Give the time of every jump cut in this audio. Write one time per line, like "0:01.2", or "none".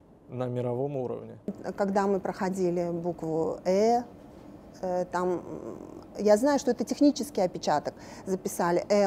0:01.6